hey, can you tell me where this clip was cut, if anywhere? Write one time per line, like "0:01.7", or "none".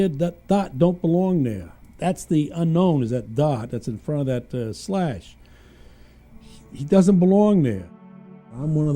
0:03.3

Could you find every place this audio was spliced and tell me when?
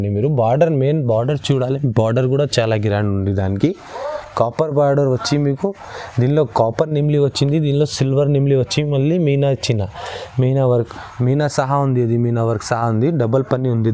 none

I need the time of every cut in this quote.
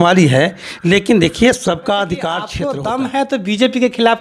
0:02.5

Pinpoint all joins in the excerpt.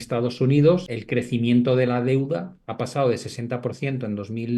0:01.0

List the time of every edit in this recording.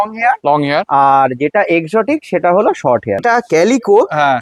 0:03.2

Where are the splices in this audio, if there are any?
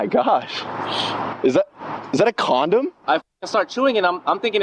none

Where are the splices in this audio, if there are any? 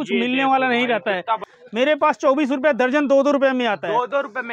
0:01.5

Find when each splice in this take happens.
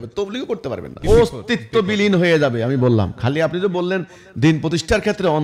0:00.9

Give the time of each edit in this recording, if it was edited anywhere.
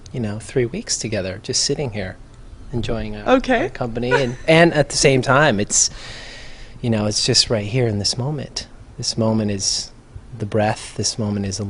0:03.0

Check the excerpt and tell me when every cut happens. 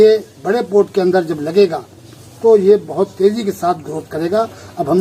none

